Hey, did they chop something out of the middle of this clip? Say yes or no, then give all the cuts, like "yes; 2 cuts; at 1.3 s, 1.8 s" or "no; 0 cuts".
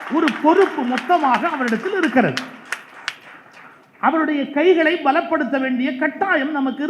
no; 0 cuts